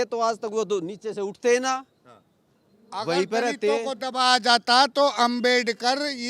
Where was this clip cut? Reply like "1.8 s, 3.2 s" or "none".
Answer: none

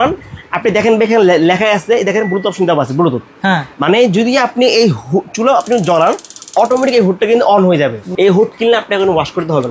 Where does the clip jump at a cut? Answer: 8.0 s

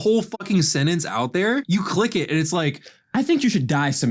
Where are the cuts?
1.6 s

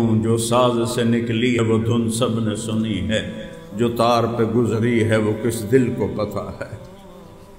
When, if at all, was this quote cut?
1.6 s

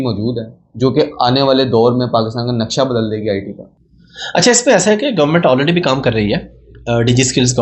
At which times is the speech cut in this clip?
none

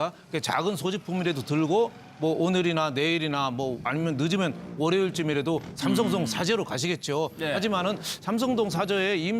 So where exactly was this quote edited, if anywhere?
1.8 s

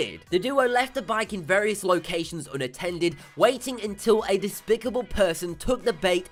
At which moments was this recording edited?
none

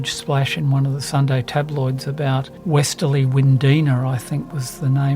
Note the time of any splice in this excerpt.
1.0 s, 2.5 s

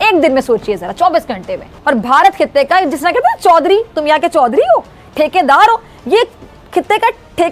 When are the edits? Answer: 1.7 s

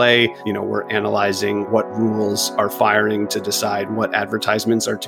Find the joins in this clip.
1.7 s

